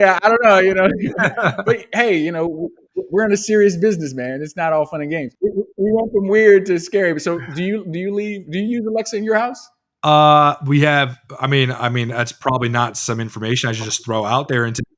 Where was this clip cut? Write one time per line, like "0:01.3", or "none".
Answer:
0:05.3